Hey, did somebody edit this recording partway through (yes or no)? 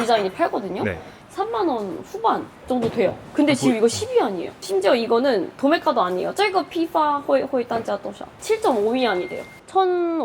yes